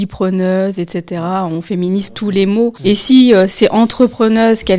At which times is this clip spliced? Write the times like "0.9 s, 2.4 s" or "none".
2.8 s